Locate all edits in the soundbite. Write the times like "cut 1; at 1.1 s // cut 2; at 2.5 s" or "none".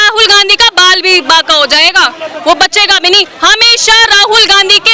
none

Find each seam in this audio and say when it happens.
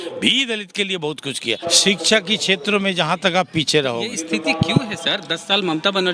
cut 1; at 1.6 s

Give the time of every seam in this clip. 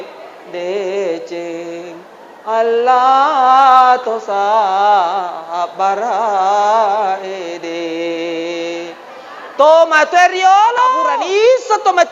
cut 1; at 11.0 s

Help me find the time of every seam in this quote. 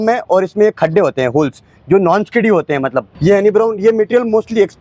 cut 1; at 3.1 s

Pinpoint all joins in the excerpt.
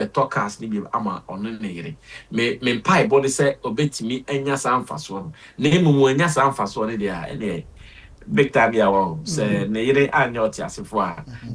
none

